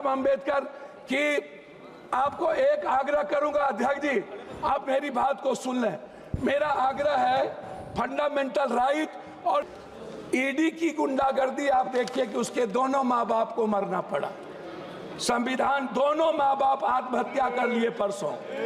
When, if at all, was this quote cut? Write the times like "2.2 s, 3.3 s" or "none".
9.7 s